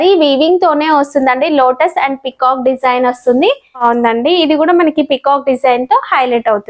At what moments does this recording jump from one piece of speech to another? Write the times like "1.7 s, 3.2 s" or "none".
3.8 s